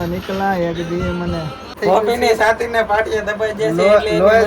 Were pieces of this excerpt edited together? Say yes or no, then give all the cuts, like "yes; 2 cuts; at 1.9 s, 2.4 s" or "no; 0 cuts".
yes; 1 cut; at 1.7 s